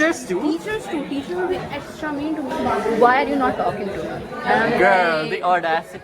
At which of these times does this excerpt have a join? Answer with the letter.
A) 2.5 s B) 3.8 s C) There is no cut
A